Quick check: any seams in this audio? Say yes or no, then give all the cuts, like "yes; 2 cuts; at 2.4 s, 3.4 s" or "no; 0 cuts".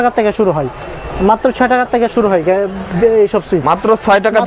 no; 0 cuts